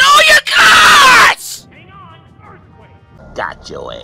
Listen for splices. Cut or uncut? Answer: cut